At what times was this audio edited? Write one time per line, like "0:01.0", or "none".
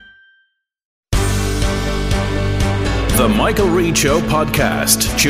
0:01.0